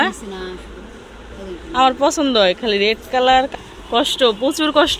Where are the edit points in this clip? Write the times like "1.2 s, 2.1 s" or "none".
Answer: 3.5 s